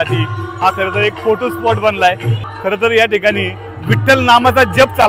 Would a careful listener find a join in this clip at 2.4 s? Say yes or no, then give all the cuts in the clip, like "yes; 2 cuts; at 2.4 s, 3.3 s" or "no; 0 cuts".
yes; 1 cut; at 2.4 s